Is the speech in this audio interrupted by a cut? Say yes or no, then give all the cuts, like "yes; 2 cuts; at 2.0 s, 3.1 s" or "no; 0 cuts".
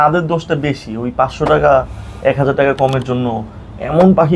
no; 0 cuts